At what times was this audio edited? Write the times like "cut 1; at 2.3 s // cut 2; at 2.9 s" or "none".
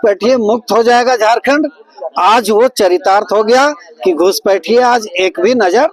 none